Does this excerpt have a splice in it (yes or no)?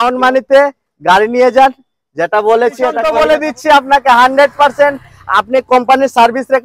yes